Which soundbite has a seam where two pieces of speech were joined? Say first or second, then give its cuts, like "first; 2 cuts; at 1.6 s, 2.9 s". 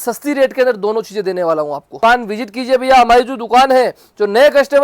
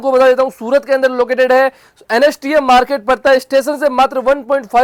first; 1 cut; at 1.9 s